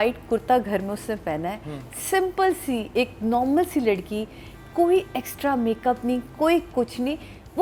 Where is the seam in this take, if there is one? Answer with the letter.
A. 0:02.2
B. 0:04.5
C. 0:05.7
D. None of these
D